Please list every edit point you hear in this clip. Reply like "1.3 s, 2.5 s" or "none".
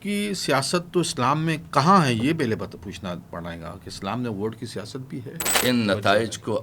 5.6 s